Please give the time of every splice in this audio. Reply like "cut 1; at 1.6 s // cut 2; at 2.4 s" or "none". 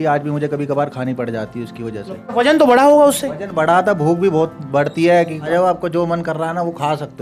cut 1; at 2.3 s // cut 2; at 5.5 s